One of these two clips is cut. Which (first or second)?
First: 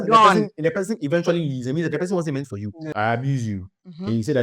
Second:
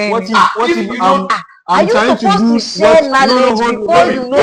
first